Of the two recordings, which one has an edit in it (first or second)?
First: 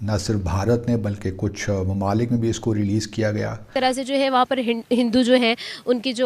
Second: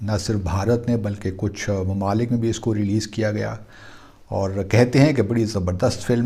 first